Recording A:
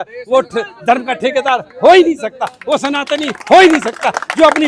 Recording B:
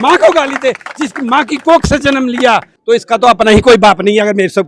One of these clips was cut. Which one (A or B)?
B